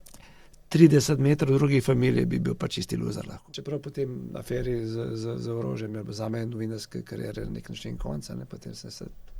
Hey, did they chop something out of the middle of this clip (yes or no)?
yes